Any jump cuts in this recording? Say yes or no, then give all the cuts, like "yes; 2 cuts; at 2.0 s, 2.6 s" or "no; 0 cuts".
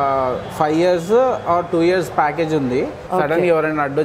yes; 1 cut; at 3.0 s